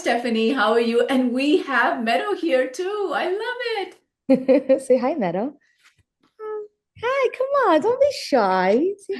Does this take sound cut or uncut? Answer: uncut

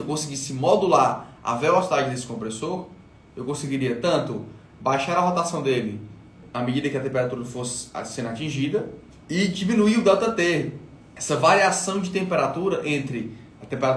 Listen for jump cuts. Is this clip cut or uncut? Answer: cut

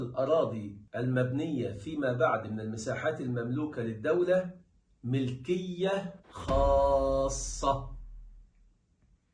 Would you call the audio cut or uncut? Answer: uncut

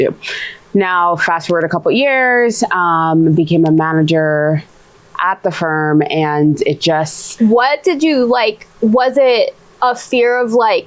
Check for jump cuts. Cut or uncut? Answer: cut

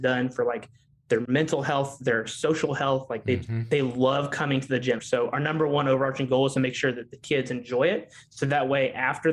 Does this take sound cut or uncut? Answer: cut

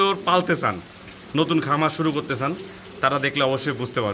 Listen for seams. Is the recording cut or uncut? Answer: uncut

